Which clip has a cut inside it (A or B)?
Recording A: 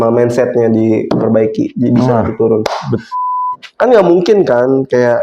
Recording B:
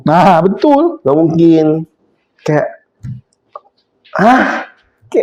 A